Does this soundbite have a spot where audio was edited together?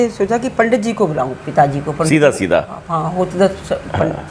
no; 0 cuts

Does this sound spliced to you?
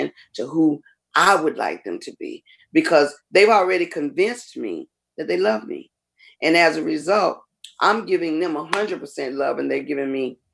no; 0 cuts

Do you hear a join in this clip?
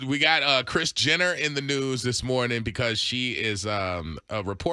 no; 0 cuts

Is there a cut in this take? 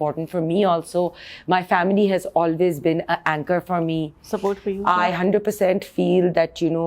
no; 0 cuts

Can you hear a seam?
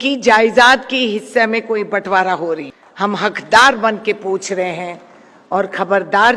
yes; 1 cut; at 2.8 s

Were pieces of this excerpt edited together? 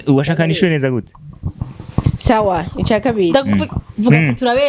no; 0 cuts

